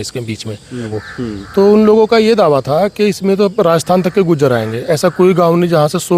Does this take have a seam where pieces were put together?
yes; 1 cut; at 1.0 s

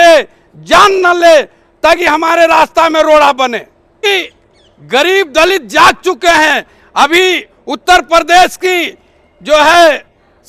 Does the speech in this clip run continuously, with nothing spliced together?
no; 1 cut; at 4.0 s

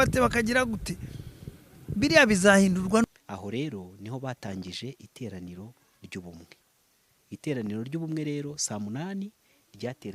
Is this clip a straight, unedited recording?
no; 1 cut; at 3.0 s

